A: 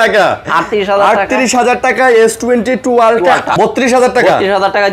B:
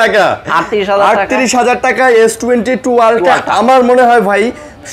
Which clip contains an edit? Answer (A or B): A